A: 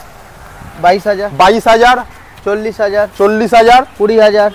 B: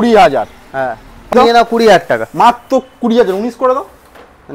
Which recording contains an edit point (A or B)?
B